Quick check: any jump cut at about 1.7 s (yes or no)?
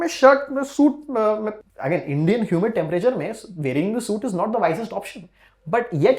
yes